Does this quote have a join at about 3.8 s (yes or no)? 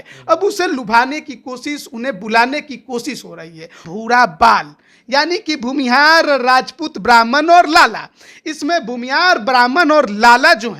yes